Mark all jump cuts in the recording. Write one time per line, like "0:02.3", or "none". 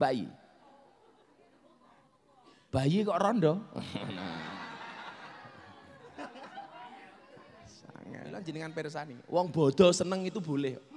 0:08.3